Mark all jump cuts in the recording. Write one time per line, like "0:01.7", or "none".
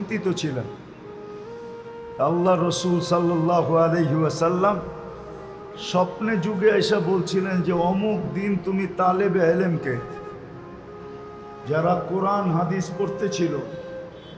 none